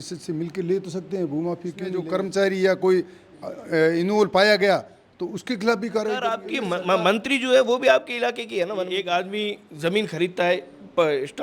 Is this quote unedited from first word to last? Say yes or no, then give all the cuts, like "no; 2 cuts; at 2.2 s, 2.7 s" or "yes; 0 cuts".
no; 3 cuts; at 2.0 s, 6.3 s, 9.0 s